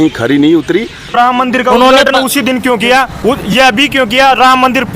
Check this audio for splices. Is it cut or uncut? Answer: cut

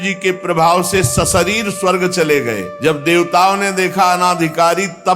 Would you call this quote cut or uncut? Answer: cut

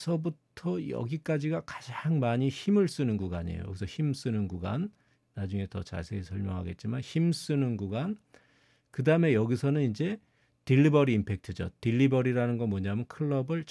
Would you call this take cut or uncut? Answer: uncut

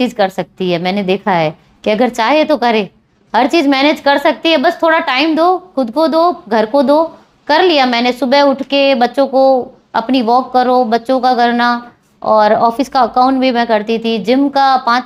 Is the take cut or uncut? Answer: uncut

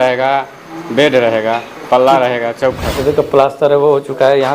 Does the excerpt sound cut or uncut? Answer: cut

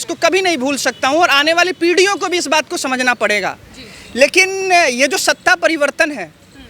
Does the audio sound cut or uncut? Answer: uncut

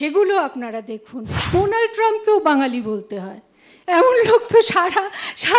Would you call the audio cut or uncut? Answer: cut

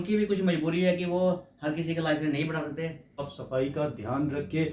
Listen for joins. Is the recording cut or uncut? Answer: cut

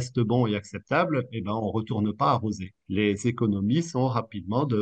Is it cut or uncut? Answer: cut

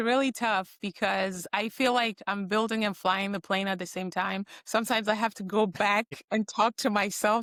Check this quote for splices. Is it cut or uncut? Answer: uncut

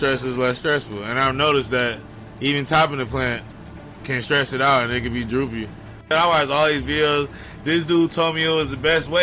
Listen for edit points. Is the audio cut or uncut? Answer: cut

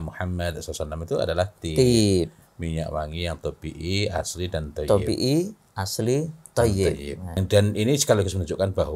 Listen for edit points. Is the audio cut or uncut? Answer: cut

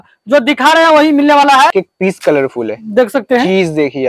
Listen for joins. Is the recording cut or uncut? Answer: cut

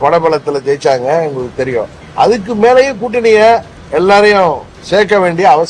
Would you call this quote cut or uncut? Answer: cut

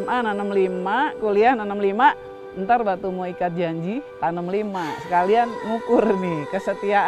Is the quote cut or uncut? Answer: cut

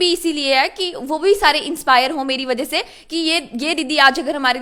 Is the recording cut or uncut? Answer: uncut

